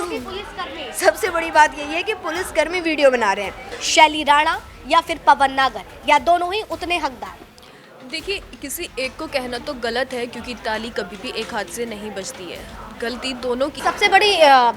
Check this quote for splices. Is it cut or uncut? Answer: cut